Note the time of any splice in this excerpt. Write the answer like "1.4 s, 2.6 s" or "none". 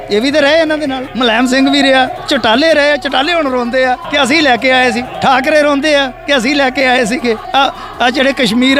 1.0 s, 2.2 s, 4.0 s, 5.1 s, 7.4 s